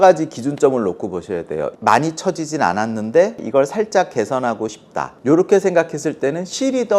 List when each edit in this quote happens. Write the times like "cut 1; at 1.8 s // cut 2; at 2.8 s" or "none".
cut 1; at 1.7 s // cut 2; at 3.4 s // cut 3; at 4.8 s

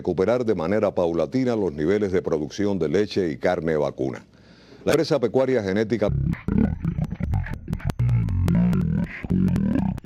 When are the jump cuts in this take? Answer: cut 1; at 4.7 s

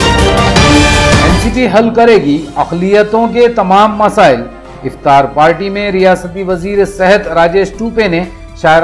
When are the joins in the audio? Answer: cut 1; at 1.3 s

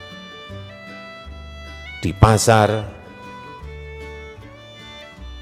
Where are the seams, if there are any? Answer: cut 1; at 3.5 s

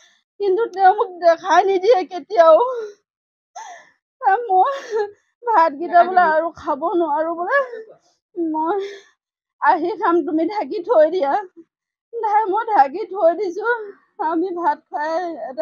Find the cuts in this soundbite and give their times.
none

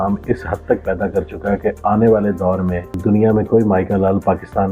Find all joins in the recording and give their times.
none

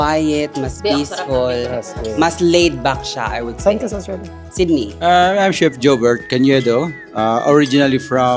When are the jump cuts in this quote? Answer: cut 1; at 4.9 s

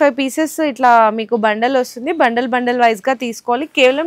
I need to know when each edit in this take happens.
none

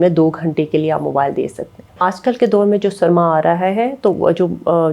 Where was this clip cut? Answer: cut 1; at 2.0 s

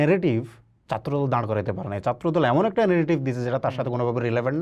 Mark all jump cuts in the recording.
none

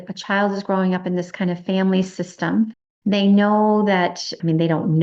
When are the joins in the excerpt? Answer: cut 1; at 2.9 s

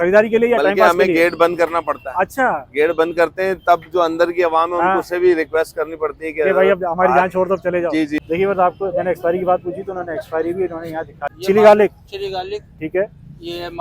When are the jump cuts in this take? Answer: cut 1; at 8.2 s // cut 2; at 11.4 s

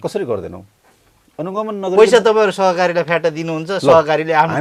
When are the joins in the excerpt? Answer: none

